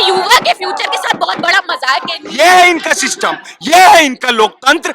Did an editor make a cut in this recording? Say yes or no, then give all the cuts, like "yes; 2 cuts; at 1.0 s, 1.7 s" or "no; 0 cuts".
yes; 1 cut; at 2.2 s